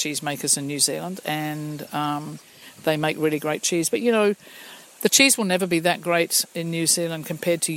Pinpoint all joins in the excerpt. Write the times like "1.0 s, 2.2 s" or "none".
none